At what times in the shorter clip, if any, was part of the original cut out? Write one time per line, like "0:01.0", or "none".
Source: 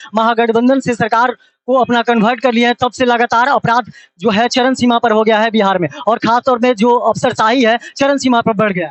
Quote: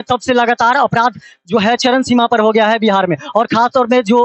none